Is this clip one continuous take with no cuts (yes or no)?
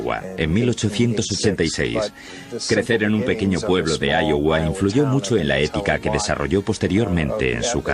no